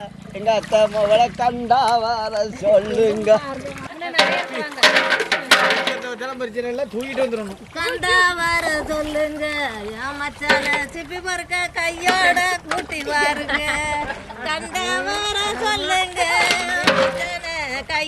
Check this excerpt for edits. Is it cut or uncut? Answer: cut